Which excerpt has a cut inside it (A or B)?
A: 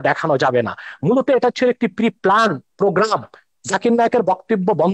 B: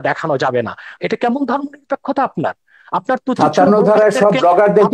B